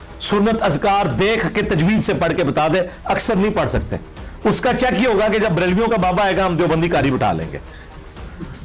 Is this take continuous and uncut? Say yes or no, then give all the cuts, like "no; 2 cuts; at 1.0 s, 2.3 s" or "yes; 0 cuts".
yes; 0 cuts